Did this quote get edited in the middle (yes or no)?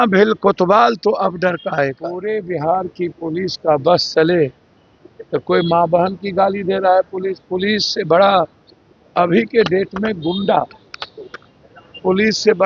yes